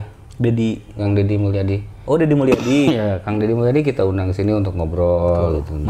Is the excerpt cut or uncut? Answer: uncut